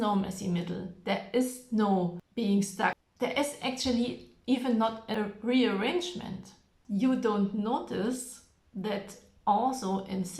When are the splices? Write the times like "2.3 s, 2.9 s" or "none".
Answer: 2.2 s, 3.0 s, 5.1 s, 6.7 s